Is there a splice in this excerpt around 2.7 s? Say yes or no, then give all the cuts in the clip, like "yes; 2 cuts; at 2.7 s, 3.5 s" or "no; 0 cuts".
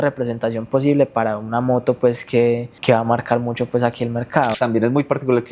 yes; 2 cuts; at 2.7 s, 4.5 s